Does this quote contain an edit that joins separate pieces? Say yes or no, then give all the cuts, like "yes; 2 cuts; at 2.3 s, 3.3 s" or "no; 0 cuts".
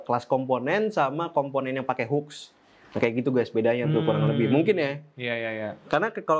no; 0 cuts